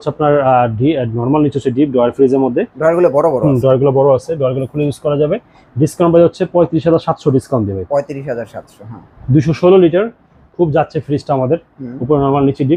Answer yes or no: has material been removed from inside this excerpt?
no